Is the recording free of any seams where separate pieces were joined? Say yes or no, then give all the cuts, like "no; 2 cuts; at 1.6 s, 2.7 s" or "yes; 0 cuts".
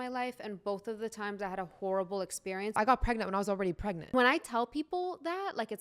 no; 2 cuts; at 2.8 s, 4.1 s